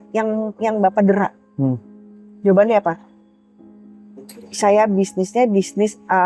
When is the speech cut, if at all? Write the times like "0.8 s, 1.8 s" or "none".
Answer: none